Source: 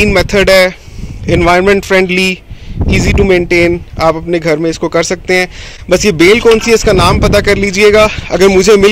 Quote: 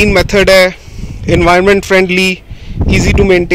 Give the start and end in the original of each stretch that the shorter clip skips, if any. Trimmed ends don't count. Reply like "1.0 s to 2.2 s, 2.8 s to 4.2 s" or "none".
none